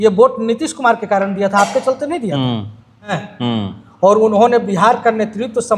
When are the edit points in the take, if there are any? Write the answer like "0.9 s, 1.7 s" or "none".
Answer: 3.3 s